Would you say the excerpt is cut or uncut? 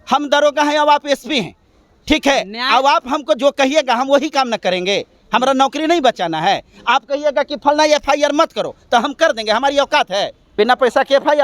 cut